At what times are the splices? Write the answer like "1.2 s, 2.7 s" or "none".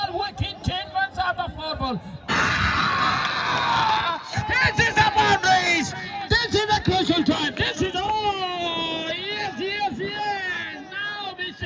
2.2 s

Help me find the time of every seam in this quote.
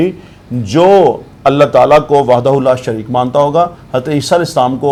none

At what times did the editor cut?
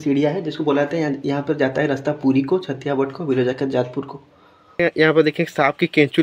4.8 s

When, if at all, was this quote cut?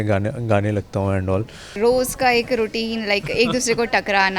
1.8 s

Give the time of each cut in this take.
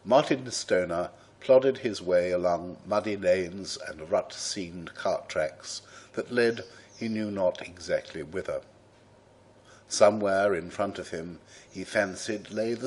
none

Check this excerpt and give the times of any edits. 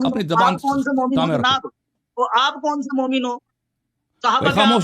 none

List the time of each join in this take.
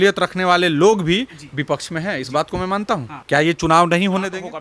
3.1 s

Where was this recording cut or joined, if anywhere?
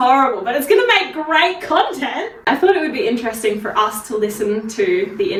none

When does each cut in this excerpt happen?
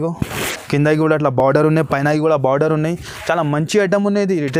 none

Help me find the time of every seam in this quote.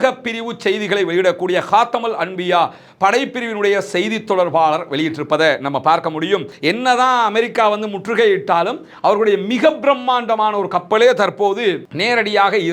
6.5 s

